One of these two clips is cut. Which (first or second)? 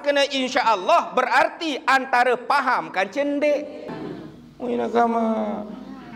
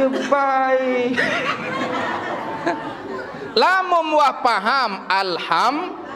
first